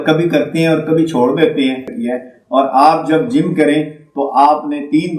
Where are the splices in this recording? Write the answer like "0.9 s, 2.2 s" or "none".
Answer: 1.9 s